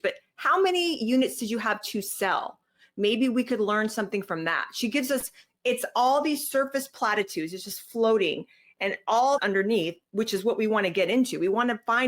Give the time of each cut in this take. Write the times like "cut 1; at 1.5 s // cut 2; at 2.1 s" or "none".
cut 1; at 9.4 s